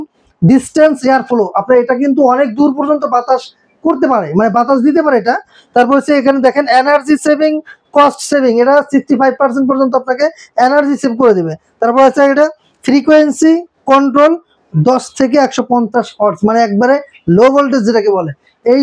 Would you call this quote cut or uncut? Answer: uncut